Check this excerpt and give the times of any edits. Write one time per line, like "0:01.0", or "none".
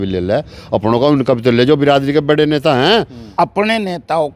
0:03.3